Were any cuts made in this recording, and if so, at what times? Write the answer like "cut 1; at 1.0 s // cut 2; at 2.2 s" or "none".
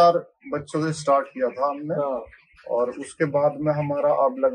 none